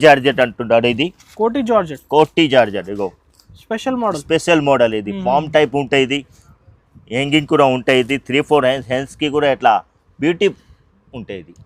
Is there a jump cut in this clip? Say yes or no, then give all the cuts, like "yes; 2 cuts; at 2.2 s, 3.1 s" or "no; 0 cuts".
no; 0 cuts